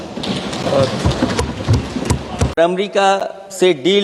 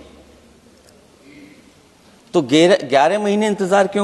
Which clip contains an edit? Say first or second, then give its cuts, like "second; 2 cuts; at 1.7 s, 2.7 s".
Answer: first; 1 cut; at 2.6 s